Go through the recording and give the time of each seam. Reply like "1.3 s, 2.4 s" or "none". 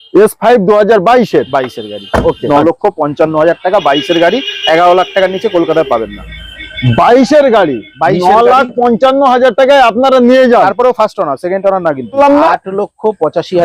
2.4 s, 12.2 s